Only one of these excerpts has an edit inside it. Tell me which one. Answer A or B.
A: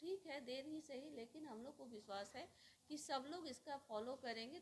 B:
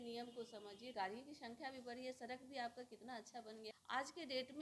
B